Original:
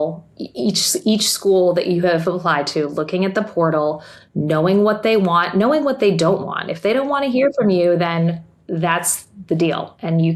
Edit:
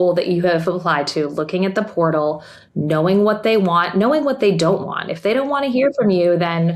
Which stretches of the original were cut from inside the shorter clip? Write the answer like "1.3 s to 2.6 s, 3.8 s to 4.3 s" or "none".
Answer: none